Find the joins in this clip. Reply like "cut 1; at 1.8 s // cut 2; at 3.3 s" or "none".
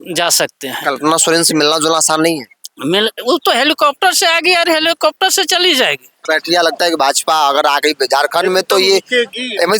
cut 1; at 6.1 s